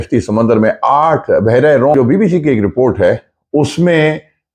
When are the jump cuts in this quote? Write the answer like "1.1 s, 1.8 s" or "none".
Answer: 1.9 s